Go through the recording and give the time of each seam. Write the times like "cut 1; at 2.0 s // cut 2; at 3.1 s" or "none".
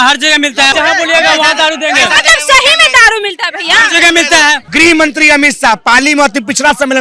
cut 1; at 0.7 s // cut 2; at 4.6 s